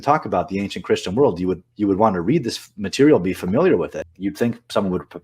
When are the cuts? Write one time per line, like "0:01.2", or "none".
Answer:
0:04.0